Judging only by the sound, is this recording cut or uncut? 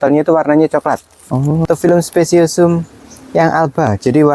cut